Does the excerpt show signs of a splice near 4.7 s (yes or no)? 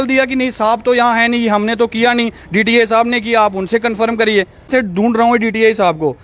yes